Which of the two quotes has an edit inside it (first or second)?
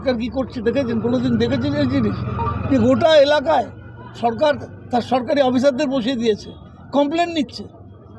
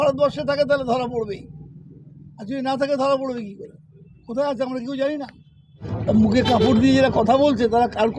second